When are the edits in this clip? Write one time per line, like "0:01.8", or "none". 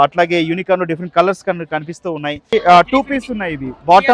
0:02.5